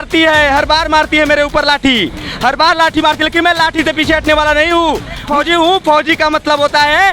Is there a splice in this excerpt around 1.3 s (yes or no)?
no